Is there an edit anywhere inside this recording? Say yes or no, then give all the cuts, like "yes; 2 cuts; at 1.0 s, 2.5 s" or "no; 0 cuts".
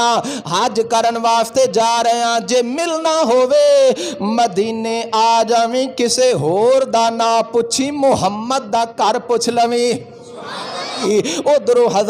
yes; 1 cut; at 11.0 s